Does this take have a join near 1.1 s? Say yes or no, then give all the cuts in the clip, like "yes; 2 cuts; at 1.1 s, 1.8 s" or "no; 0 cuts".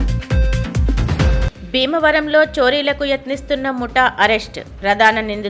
yes; 1 cut; at 1.1 s